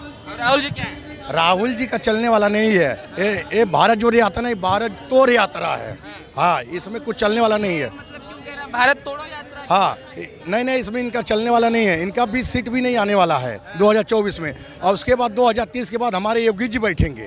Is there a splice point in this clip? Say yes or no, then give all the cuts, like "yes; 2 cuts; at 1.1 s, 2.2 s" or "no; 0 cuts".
no; 0 cuts